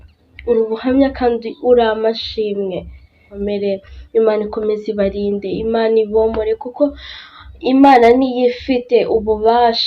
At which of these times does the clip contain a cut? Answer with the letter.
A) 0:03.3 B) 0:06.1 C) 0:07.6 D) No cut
A